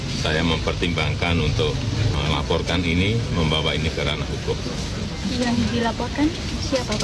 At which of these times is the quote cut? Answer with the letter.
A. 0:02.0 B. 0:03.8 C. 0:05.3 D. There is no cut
D